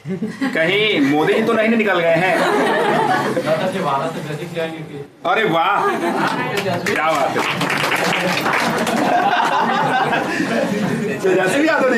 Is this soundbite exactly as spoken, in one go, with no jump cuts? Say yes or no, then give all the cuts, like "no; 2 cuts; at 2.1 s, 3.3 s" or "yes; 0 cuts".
yes; 0 cuts